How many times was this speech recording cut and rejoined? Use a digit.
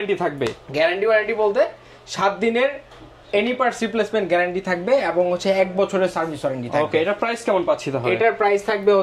0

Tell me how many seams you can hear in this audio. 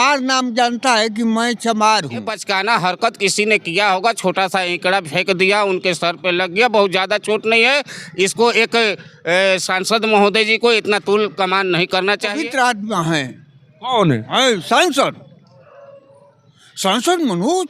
2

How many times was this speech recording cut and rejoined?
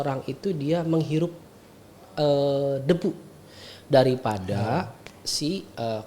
0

